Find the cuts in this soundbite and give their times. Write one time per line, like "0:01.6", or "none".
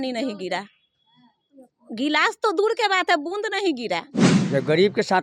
0:04.2